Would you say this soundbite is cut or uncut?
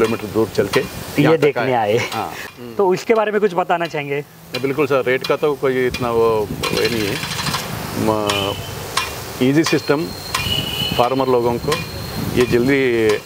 cut